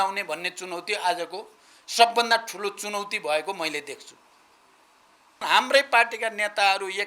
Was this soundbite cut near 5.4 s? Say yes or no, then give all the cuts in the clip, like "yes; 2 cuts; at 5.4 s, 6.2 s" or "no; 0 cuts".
yes; 1 cut; at 5.4 s